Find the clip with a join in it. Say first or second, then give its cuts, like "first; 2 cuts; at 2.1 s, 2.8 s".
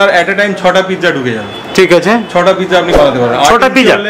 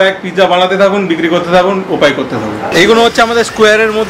second; 1 cut; at 2.6 s